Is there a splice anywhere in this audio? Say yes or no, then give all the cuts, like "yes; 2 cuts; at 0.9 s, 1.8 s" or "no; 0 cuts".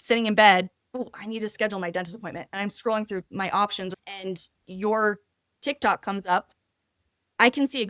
yes; 2 cuts; at 3.3 s, 3.9 s